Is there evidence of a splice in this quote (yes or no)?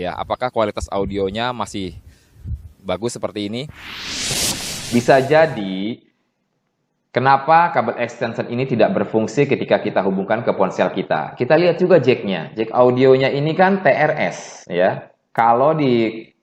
yes